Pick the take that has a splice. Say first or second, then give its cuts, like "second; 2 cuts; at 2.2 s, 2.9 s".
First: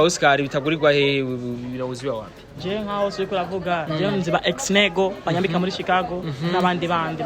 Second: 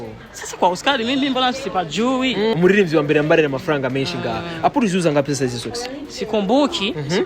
second; 1 cut; at 2.5 s